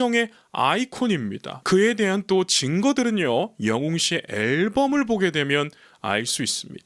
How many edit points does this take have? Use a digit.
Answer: 1